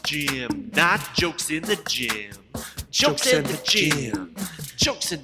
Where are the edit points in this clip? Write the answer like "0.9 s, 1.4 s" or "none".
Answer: none